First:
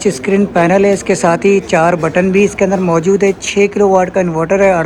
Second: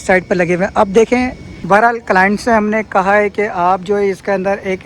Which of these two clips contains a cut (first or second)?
second